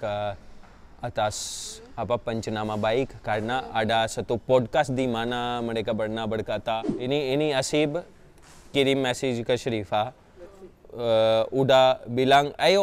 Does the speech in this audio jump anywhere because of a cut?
yes; 1 cut; at 6.9 s

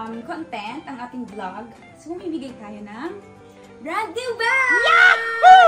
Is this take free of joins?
yes; 0 cuts

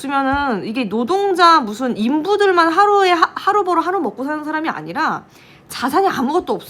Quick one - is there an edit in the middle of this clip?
no; 0 cuts

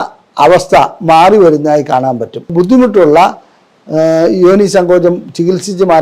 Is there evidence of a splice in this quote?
yes; 1 cut; at 2.5 s

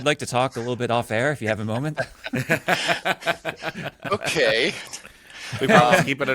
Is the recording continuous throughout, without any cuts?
yes; 0 cuts

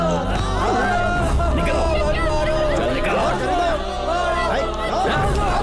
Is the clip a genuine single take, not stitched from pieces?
yes; 0 cuts

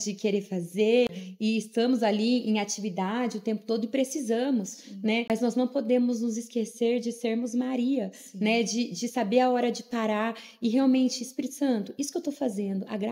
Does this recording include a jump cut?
yes; 2 cuts; at 1.1 s, 5.3 s

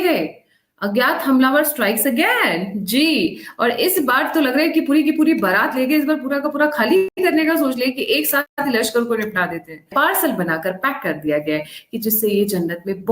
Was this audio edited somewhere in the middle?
yes; 3 cuts; at 7.1 s, 8.5 s, 9.9 s

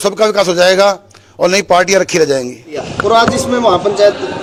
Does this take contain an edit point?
no; 0 cuts

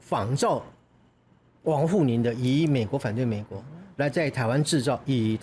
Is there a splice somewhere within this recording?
no; 0 cuts

